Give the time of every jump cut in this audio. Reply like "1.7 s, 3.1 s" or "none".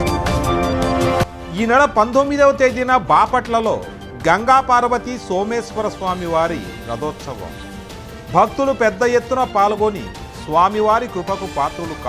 1.2 s